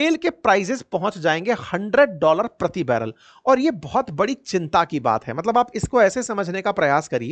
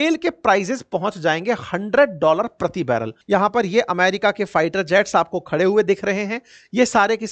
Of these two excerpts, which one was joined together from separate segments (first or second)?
second